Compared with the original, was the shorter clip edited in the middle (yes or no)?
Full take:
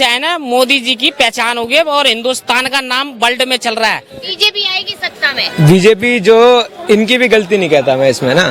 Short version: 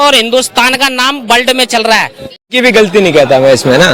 yes